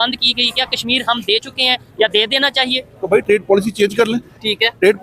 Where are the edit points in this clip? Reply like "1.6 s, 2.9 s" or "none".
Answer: none

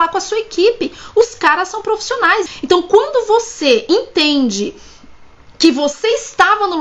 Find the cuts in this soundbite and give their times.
2.5 s

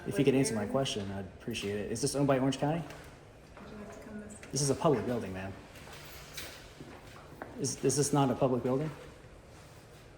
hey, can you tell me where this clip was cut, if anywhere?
none

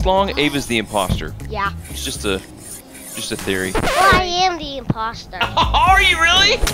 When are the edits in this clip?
none

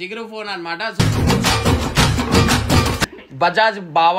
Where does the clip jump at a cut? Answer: 3.2 s

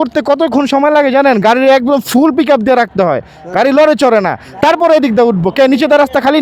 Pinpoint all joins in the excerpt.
none

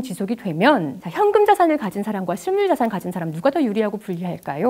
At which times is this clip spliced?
1.0 s

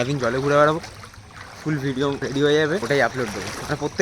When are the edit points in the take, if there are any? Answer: 2.2 s, 2.8 s

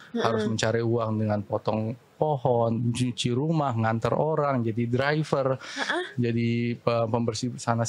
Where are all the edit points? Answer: none

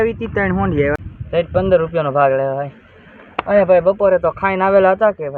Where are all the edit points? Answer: 1.0 s

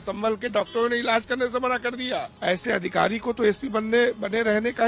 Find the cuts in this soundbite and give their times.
2.3 s

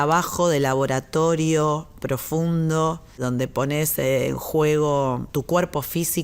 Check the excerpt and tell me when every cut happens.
3.2 s, 5.2 s

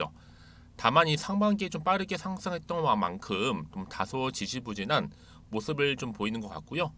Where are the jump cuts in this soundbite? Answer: none

